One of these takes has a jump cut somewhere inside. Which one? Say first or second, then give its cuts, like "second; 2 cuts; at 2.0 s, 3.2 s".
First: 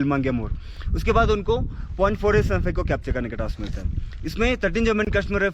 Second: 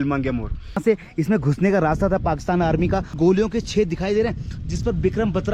second; 2 cuts; at 0.8 s, 3.1 s